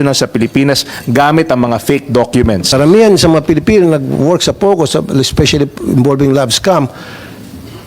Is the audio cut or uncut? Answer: cut